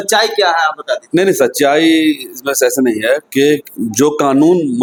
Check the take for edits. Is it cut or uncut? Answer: uncut